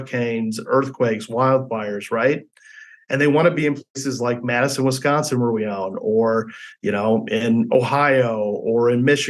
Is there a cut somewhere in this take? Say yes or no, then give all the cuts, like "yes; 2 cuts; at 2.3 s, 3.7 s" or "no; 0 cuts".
no; 0 cuts